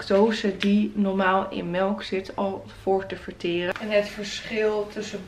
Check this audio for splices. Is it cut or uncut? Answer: cut